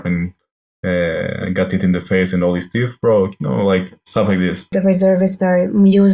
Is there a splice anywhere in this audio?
no; 0 cuts

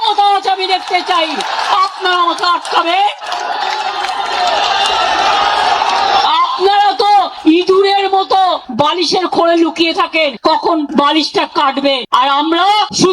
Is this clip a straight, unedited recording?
yes; 0 cuts

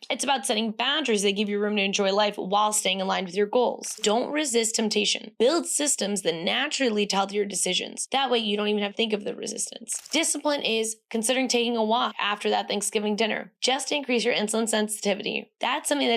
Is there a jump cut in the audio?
yes; 2 cuts; at 4.0 s, 10.0 s

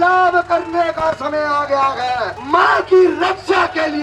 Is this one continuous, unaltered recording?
no; 1 cut; at 2.4 s

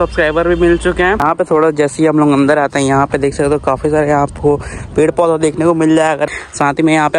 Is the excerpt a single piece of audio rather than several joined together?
no; 2 cuts; at 1.2 s, 6.2 s

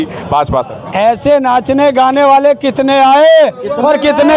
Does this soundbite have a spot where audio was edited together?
no; 0 cuts

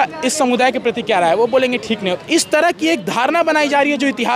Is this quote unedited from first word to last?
yes; 0 cuts

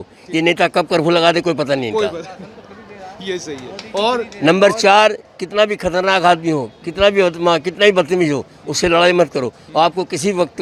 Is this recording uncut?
yes; 0 cuts

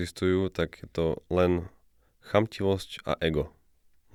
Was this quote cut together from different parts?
no; 0 cuts

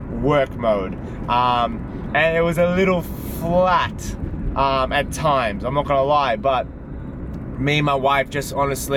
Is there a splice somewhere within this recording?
no; 0 cuts

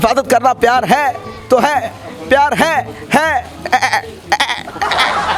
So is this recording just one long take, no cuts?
yes; 0 cuts

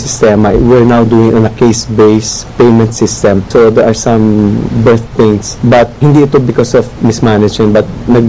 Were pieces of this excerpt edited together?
no; 0 cuts

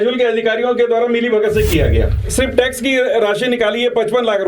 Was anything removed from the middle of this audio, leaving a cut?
yes; 1 cut; at 2.2 s

